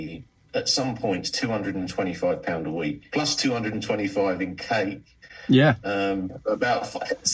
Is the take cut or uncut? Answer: uncut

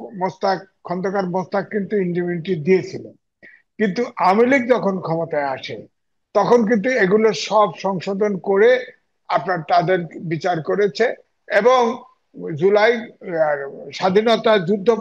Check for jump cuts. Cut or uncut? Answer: uncut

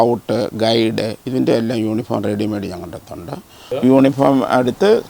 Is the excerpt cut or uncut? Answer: cut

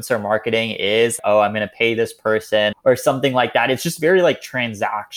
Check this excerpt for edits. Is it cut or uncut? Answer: cut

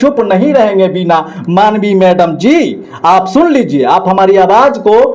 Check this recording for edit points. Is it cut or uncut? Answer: uncut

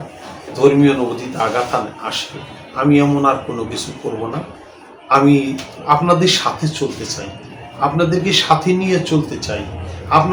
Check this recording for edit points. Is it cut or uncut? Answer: uncut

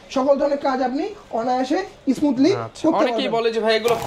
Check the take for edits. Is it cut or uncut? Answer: uncut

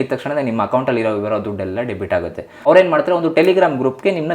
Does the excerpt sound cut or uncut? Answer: cut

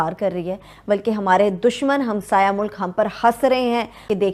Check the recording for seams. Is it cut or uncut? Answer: uncut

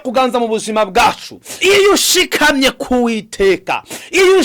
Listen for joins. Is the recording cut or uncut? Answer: cut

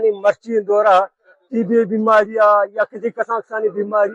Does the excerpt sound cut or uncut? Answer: uncut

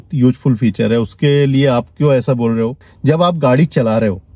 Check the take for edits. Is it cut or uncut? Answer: cut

